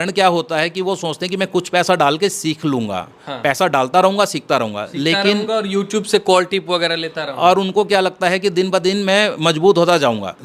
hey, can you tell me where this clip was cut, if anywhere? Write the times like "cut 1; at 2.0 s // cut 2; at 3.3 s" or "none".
none